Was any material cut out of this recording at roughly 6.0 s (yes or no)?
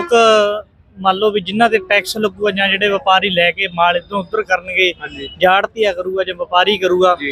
no